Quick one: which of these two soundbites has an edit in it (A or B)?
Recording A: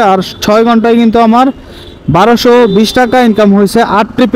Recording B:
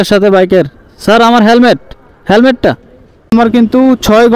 B